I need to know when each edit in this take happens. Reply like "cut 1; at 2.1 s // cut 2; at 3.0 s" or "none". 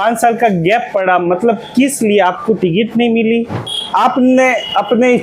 cut 1; at 3.9 s